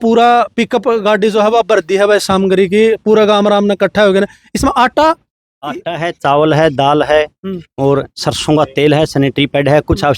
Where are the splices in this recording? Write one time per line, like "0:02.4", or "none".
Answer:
none